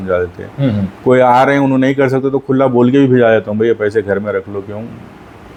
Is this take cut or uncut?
uncut